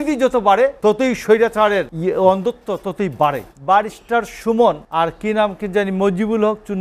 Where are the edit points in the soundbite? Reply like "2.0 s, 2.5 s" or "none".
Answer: 0.8 s, 1.9 s, 3.5 s, 4.8 s